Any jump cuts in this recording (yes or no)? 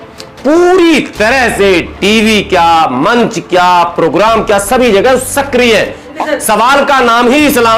yes